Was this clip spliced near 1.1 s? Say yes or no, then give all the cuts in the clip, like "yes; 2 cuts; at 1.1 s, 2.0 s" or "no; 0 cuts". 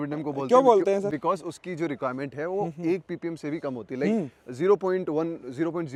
no; 0 cuts